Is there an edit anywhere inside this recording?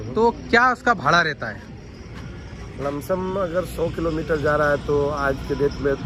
no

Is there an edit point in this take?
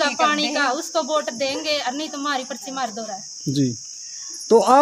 no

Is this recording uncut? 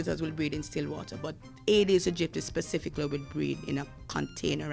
yes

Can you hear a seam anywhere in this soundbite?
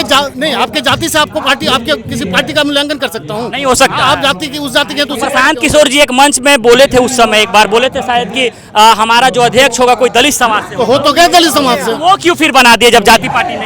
no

